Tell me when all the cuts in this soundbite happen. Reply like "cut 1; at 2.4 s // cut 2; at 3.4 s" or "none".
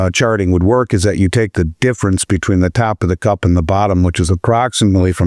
none